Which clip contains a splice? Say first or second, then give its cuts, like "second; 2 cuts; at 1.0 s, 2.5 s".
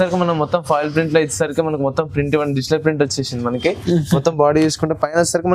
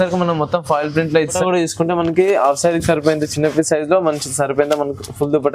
second; 1 cut; at 1.4 s